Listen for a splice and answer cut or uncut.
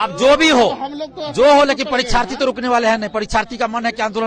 uncut